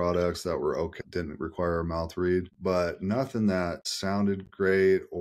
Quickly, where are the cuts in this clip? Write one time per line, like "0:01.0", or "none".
0:01.0
0:02.5
0:03.9